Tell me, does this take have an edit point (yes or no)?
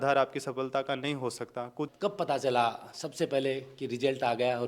yes